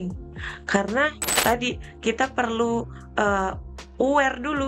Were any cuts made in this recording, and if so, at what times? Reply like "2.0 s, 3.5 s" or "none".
1.2 s